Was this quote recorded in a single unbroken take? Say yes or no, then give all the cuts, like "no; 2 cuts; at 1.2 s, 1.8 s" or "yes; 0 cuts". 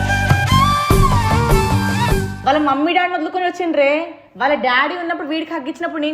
no; 1 cut; at 2.3 s